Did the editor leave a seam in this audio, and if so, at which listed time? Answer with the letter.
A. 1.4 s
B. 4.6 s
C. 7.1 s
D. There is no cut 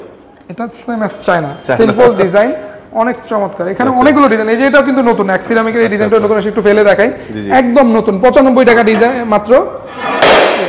D